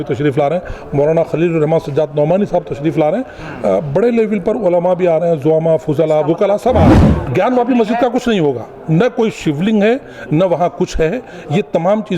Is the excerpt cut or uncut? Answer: cut